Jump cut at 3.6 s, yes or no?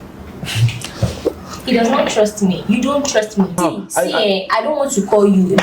yes